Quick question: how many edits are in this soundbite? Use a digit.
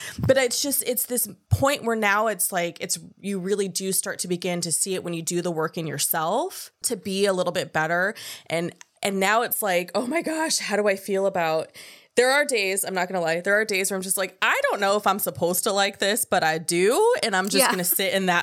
1